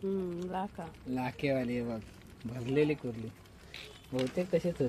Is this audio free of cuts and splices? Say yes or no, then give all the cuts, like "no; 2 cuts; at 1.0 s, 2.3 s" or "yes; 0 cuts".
yes; 0 cuts